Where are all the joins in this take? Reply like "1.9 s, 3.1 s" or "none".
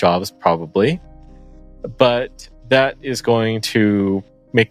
none